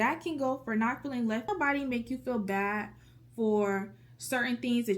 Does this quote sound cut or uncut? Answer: cut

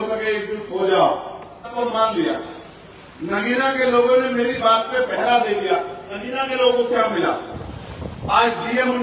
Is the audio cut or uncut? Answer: cut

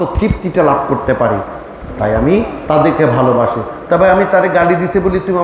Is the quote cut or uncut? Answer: uncut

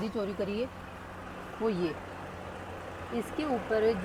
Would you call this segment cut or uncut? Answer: uncut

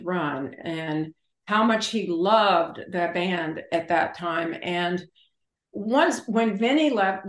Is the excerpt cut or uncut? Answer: uncut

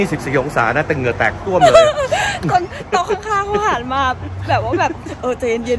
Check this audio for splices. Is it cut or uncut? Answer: uncut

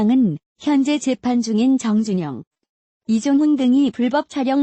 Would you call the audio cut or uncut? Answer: cut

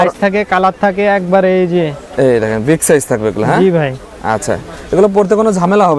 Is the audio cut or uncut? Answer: uncut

